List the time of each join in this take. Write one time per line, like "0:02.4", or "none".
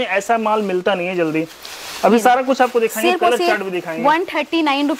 none